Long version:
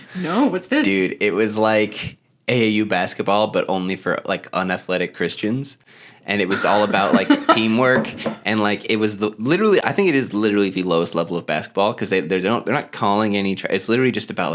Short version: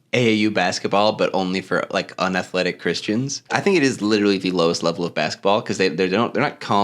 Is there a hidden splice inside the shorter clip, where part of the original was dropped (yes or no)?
yes